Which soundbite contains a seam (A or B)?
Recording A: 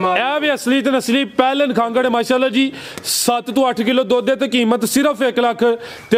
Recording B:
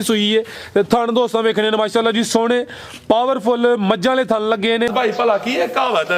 B